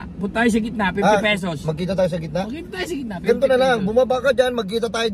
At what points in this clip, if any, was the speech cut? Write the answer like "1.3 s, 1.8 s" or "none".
none